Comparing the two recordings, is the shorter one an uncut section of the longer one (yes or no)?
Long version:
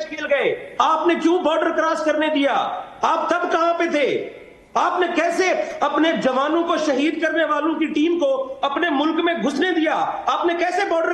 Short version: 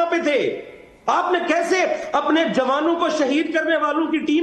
yes